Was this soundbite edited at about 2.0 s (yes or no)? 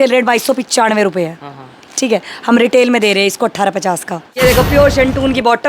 no